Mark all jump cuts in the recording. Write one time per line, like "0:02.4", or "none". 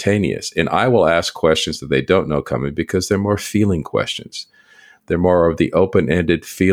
none